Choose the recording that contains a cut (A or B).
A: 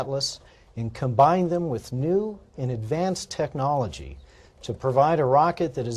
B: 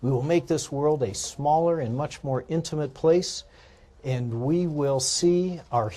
B